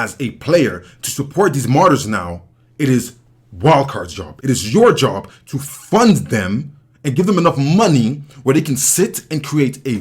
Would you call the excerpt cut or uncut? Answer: cut